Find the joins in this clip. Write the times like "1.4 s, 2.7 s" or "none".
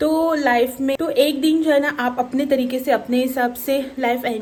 none